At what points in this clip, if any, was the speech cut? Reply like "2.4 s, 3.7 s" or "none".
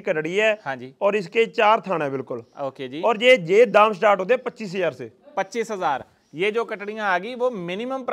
none